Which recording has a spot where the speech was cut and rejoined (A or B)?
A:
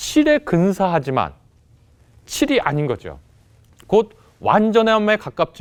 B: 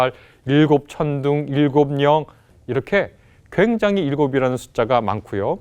B